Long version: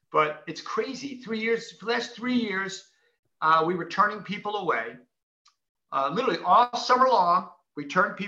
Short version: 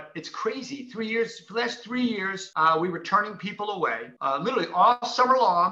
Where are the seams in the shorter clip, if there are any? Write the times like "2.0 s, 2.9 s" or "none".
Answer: 2.4 s, 4.1 s